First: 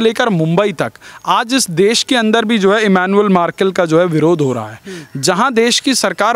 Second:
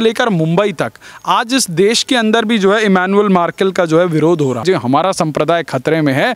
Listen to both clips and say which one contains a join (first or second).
second